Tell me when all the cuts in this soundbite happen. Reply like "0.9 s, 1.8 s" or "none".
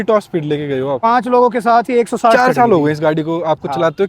1.0 s, 2.3 s